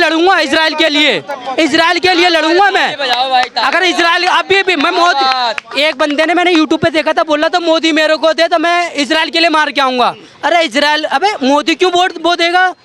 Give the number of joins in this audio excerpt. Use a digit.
0